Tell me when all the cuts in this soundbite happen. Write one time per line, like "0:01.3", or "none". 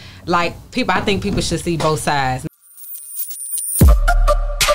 0:02.4